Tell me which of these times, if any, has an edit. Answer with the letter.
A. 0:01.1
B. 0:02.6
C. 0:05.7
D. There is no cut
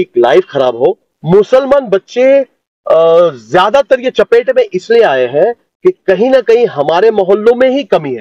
A